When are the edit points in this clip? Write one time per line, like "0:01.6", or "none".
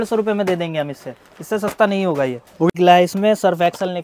0:02.7